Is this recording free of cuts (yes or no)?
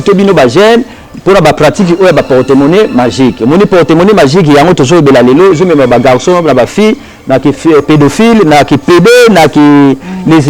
yes